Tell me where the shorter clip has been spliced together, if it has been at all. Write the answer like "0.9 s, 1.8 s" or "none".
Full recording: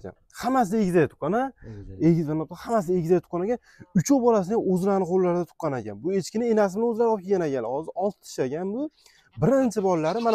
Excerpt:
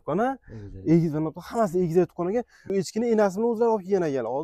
2.6 s